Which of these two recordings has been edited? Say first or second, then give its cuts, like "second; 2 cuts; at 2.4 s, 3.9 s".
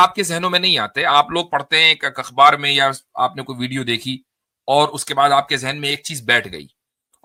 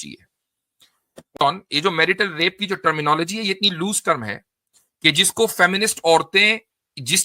second; 1 cut; at 1.4 s